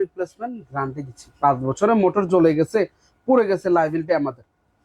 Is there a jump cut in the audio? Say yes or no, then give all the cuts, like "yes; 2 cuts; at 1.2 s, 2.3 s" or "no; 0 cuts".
no; 0 cuts